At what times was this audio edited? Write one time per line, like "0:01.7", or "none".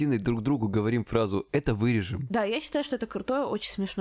0:02.2